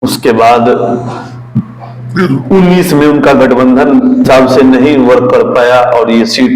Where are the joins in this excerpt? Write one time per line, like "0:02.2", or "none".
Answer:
0:04.2